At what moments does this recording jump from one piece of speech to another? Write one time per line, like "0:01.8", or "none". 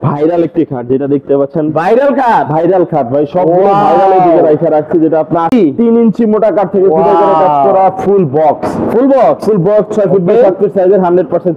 0:05.5